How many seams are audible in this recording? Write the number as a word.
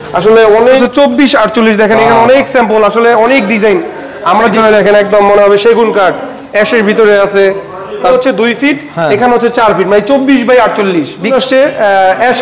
four